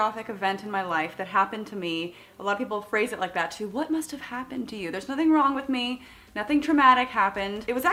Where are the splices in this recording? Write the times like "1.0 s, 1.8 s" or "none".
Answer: none